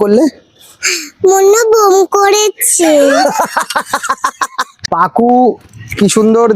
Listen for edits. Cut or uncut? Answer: cut